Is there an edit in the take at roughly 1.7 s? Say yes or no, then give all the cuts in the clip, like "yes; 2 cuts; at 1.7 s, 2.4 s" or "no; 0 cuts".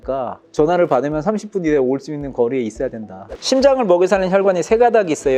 no; 1 cut; at 3.3 s